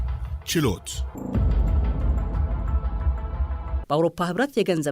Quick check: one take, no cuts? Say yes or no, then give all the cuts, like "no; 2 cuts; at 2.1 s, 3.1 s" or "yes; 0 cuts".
no; 2 cuts; at 1.0 s, 3.8 s